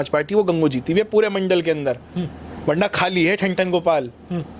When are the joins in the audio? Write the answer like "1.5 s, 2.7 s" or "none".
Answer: none